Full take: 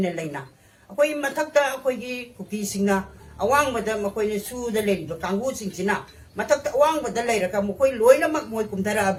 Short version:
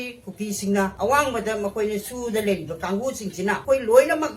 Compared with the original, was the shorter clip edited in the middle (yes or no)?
yes